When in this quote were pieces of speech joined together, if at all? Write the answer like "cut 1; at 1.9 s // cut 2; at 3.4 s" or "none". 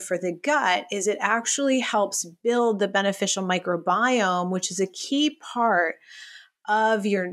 none